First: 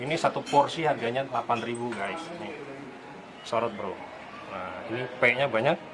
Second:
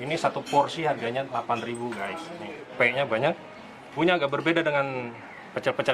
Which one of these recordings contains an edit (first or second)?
second